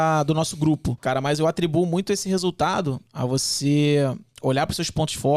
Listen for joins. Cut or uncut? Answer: cut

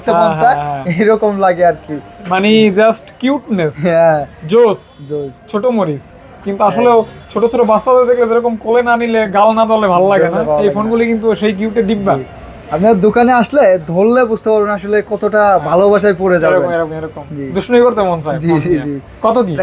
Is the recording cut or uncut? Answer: uncut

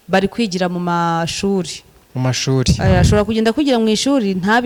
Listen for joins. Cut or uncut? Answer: uncut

